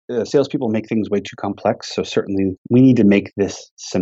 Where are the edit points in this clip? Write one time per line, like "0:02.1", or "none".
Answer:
0:02.6

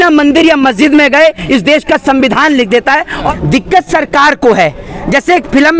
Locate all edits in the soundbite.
0:03.1

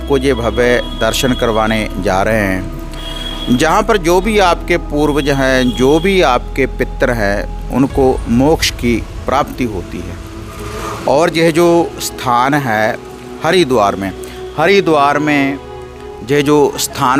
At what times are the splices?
none

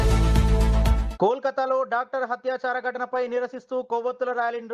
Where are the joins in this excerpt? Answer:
0:01.0

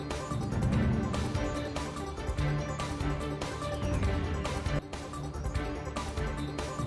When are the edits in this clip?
0:01.9

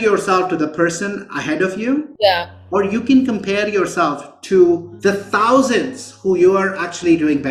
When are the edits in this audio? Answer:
none

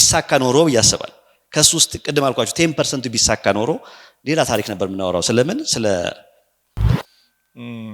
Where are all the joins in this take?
0:06.9

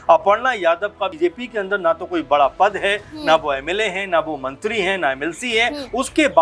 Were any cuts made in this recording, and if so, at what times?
0:01.1

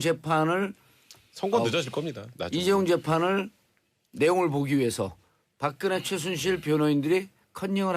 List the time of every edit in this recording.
0:04.8

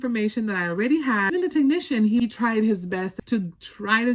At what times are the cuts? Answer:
0:01.3
0:02.2
0:03.2

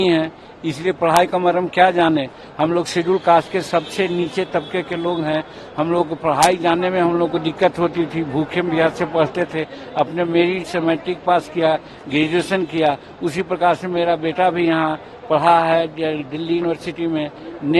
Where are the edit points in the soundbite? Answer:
none

